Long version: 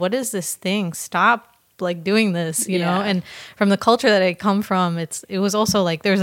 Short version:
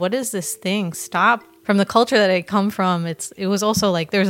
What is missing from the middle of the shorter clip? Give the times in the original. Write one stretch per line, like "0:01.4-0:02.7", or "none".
0:01.5-0:03.4